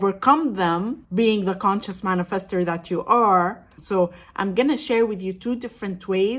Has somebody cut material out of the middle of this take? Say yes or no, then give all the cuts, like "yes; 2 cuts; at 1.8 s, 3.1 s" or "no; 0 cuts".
yes; 1 cut; at 3.7 s